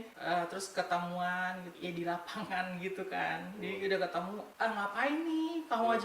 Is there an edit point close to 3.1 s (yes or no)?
no